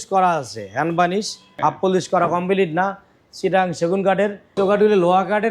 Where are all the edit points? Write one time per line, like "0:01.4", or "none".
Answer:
0:01.4
0:04.6